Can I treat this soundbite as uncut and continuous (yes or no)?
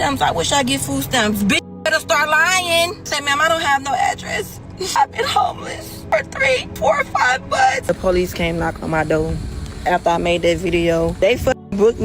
no